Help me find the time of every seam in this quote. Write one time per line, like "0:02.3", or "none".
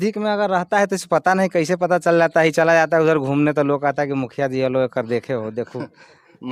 none